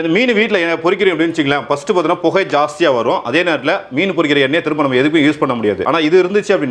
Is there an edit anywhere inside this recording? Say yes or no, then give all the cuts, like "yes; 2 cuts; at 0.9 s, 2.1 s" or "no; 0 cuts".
yes; 1 cut; at 5.8 s